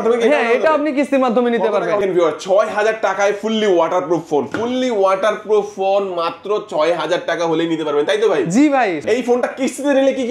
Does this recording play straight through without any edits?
no; 2 cuts; at 2.0 s, 9.0 s

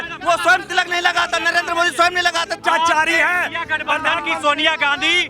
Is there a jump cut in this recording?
yes; 1 cut; at 2.6 s

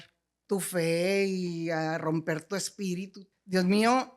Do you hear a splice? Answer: yes; 1 cut; at 3.2 s

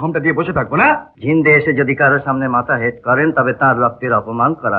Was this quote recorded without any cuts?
no; 1 cut; at 1.1 s

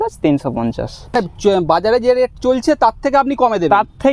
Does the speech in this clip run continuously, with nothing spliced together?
no; 1 cut; at 1.1 s

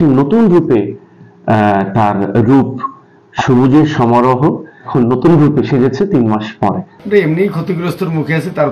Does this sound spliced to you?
yes; 1 cut; at 6.9 s

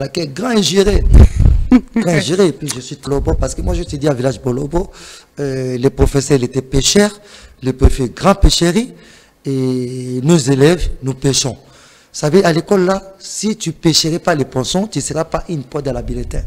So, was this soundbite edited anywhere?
yes; 1 cut; at 3.1 s

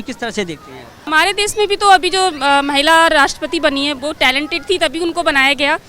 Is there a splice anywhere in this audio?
yes; 1 cut; at 1.0 s

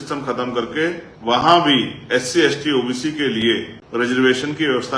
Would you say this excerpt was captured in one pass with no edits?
no; 2 cuts; at 1.1 s, 3.8 s

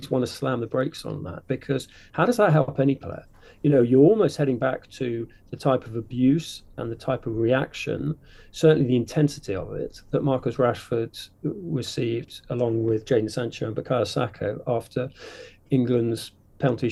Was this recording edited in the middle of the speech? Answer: no; 0 cuts

